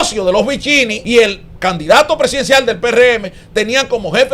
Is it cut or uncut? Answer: cut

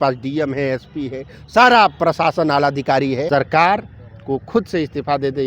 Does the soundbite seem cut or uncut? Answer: cut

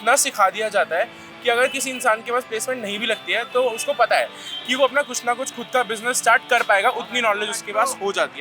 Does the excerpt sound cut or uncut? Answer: uncut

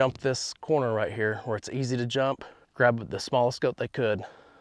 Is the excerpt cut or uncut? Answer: cut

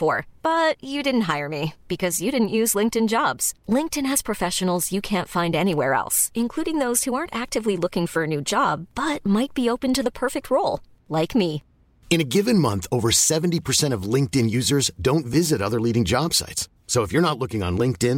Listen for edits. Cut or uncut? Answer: uncut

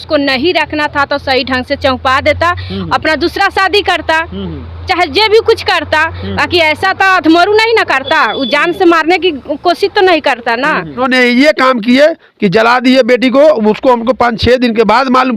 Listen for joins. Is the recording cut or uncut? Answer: cut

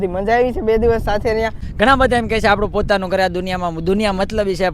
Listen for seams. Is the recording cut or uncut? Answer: cut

